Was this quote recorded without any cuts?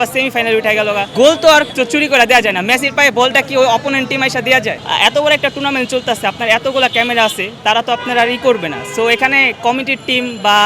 no; 3 cuts; at 1.1 s, 1.7 s, 4.8 s

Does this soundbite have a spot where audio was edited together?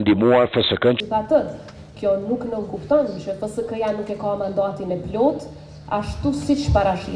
yes; 1 cut; at 1.0 s

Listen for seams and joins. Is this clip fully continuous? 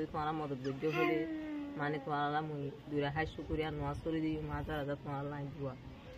yes; 0 cuts

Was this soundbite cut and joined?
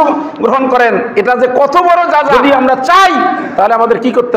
yes; 1 cut; at 2.3 s

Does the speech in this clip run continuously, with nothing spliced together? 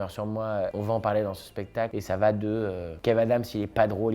no; 2 cuts; at 0.7 s, 1.9 s

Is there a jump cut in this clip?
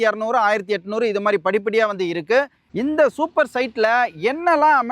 yes; 1 cut; at 2.7 s

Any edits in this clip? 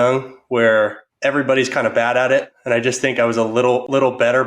yes; 2 cuts; at 1.1 s, 2.5 s

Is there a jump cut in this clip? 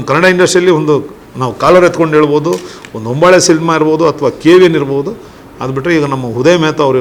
no; 0 cuts

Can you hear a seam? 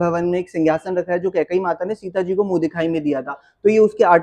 no; 0 cuts

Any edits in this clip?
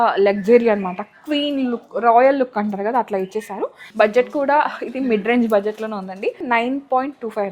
yes; 2 cuts; at 3.8 s, 6.4 s

